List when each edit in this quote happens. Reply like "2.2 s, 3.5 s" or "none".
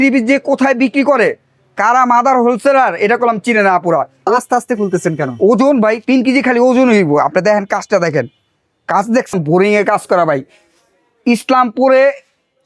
4.2 s, 9.3 s